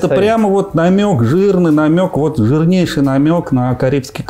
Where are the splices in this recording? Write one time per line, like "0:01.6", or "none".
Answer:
none